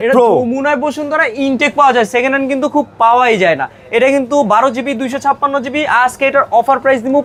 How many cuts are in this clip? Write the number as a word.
zero